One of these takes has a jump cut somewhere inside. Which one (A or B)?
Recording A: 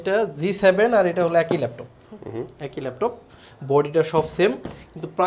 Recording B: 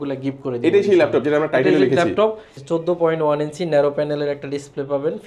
B